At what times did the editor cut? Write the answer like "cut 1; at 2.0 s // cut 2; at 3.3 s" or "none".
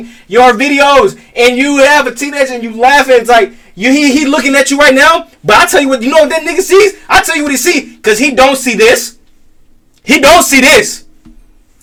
none

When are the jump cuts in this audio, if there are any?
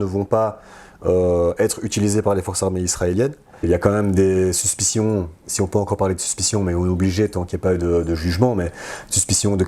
cut 1; at 3.6 s

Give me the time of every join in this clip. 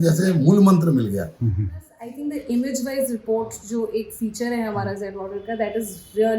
cut 1; at 1.9 s

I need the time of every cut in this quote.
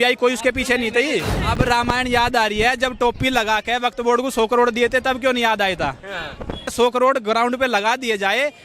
cut 1; at 1.4 s // cut 2; at 6.7 s

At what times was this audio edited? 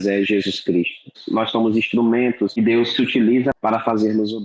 cut 1; at 1.2 s // cut 2; at 2.5 s // cut 3; at 3.6 s

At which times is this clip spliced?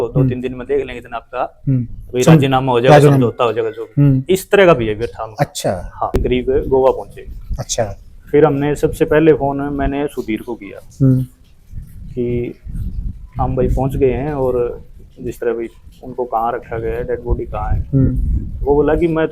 cut 1; at 6.2 s

